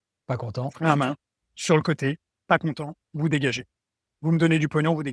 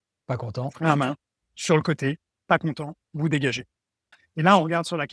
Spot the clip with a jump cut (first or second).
second